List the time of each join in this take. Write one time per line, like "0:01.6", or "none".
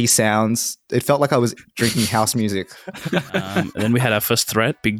0:03.7

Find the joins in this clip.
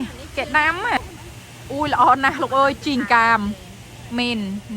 0:01.0

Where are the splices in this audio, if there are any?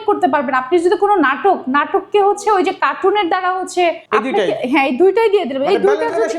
0:04.0

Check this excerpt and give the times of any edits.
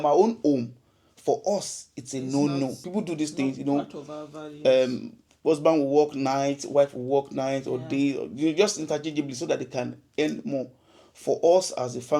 0:02.8

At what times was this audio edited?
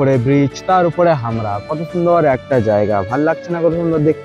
none

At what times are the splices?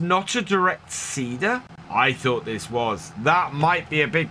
0:01.8

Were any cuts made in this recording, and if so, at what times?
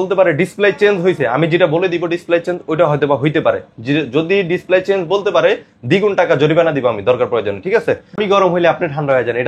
0:08.1

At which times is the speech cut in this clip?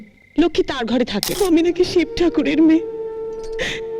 0:01.3

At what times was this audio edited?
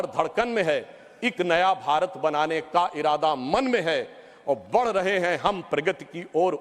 0:01.8

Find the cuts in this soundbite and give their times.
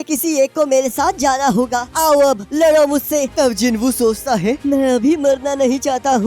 0:03.3

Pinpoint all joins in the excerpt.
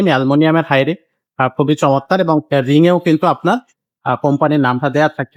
none

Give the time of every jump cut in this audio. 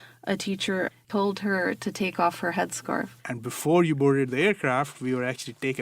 0:03.2

